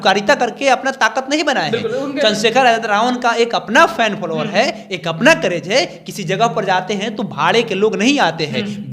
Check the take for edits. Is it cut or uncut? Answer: uncut